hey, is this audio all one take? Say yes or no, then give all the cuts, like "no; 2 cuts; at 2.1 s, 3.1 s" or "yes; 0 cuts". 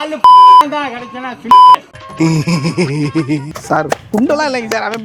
no; 1 cut; at 3.5 s